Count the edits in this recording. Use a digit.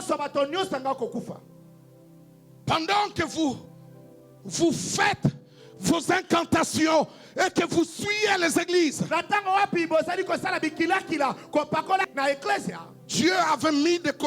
1